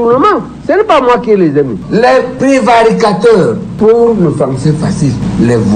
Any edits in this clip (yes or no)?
yes